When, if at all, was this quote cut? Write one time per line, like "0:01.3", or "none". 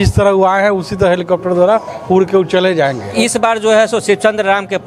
0:03.1

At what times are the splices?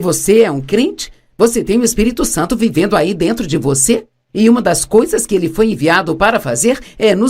0:03.5

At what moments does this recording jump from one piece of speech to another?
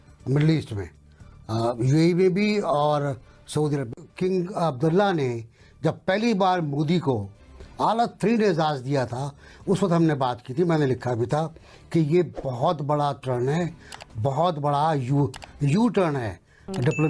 none

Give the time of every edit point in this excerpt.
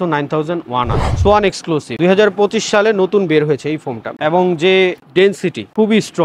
0:01.1
0:04.1

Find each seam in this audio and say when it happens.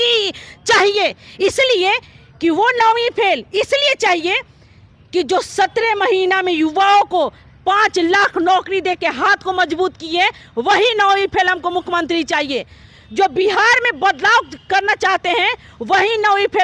none

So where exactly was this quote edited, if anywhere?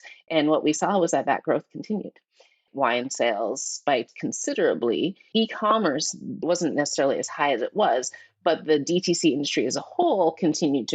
0:02.7

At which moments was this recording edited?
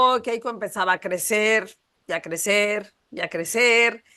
none

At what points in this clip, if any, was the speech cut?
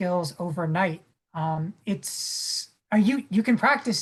none

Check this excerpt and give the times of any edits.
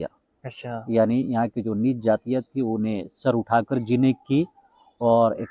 none

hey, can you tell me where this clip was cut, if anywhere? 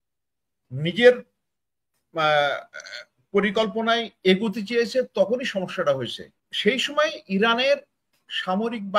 0:06.4

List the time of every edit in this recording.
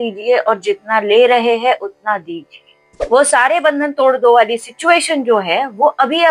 0:03.0

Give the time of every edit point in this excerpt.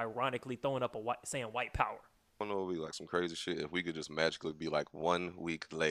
0:02.4

